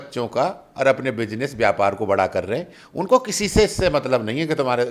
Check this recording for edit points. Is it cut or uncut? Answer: uncut